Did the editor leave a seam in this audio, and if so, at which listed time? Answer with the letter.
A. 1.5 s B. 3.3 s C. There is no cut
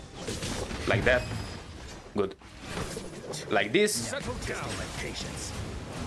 C